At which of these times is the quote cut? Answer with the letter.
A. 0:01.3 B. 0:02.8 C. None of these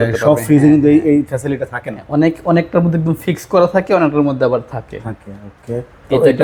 C